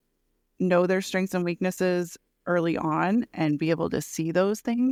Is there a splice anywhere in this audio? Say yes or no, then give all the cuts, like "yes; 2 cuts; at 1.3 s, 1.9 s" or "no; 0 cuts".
no; 0 cuts